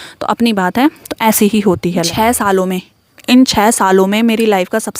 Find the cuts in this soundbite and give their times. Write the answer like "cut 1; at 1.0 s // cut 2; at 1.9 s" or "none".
cut 1; at 2.1 s

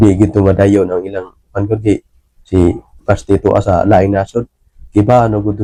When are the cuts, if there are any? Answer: none

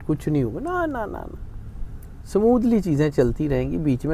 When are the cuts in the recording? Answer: none

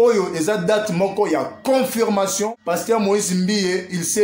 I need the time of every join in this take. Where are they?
cut 1; at 2.6 s

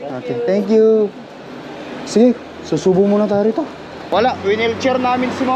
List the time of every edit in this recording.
cut 1; at 4.0 s

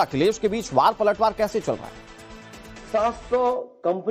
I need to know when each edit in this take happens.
cut 1; at 3.2 s

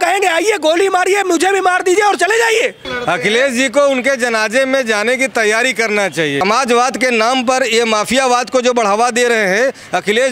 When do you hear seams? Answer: cut 1; at 2.9 s // cut 2; at 6.4 s

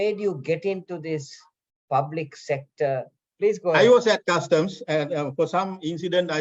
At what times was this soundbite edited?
cut 1; at 3.2 s

